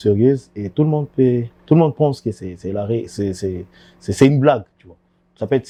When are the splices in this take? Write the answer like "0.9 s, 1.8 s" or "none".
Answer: none